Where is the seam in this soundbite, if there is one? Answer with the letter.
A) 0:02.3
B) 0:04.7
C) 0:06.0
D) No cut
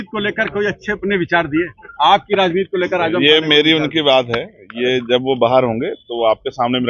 D